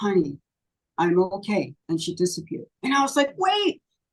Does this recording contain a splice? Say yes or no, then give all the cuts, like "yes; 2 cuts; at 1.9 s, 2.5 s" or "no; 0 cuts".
yes; 2 cuts; at 1.8 s, 2.7 s